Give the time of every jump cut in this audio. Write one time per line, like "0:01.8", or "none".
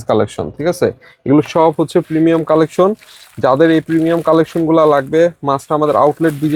none